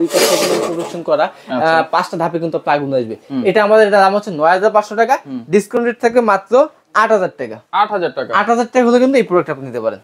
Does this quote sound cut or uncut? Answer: uncut